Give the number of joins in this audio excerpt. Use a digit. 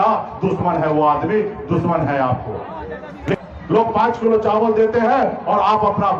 1